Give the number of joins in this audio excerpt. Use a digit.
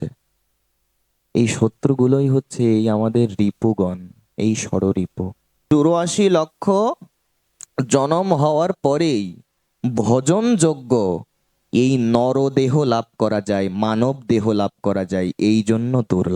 1